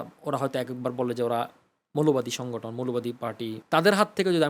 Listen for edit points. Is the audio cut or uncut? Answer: cut